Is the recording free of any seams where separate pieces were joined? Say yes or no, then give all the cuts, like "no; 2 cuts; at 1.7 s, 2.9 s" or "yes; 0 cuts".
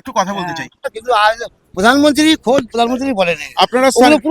no; 1 cut; at 1.0 s